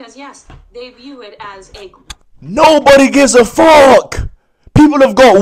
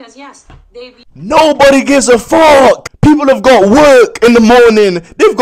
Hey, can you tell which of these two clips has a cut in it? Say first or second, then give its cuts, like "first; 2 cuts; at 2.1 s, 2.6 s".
second; 2 cuts; at 1.0 s, 2.9 s